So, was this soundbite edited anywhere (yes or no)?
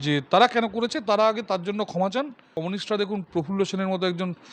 yes